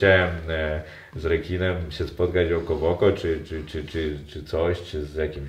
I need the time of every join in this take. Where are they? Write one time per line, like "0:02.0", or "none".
none